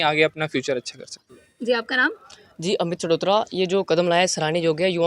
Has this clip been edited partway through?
no; 0 cuts

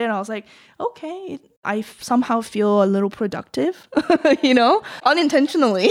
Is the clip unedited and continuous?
no; 2 cuts; at 1.6 s, 4.9 s

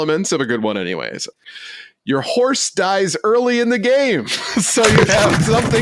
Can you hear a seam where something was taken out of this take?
yes; 1 cut; at 1.4 s

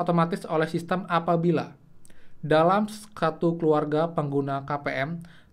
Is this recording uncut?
yes; 0 cuts

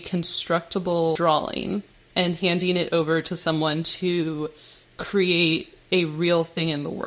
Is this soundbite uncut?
no; 2 cuts; at 1.2 s, 2.0 s

